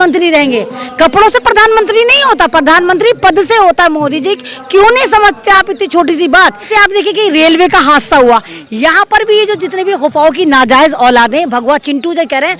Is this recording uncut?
no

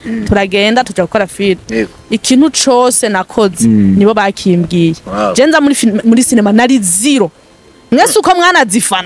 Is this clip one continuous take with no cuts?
yes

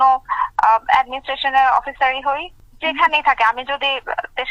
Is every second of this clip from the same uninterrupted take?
yes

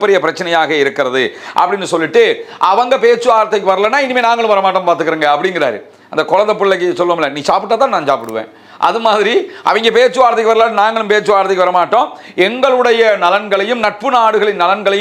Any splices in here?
no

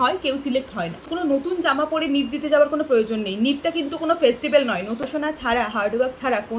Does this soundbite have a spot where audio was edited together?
yes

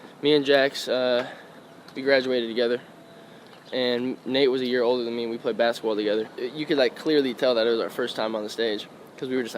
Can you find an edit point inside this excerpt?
yes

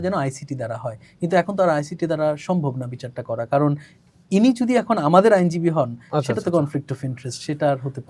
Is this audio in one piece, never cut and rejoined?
yes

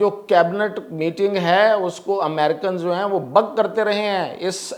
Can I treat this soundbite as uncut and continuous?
yes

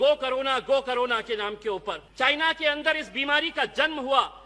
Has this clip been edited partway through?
yes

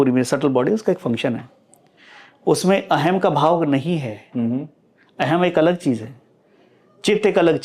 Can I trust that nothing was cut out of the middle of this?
yes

